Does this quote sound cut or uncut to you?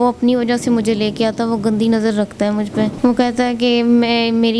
cut